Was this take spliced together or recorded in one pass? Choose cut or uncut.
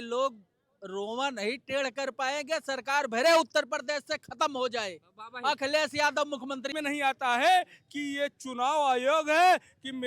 cut